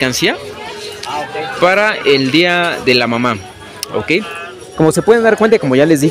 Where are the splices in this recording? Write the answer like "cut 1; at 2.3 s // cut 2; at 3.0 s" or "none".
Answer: none